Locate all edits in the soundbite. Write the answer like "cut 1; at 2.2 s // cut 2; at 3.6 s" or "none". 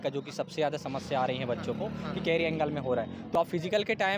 cut 1; at 3.3 s

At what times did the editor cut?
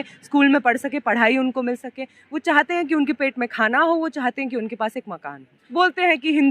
cut 1; at 5.5 s

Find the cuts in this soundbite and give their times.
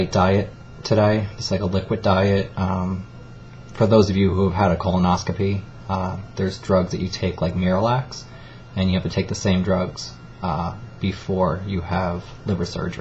none

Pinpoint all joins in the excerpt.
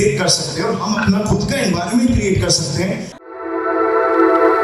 cut 1; at 3.2 s

